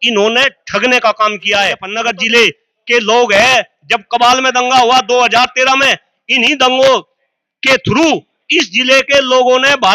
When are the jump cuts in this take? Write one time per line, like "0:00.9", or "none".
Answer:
0:01.9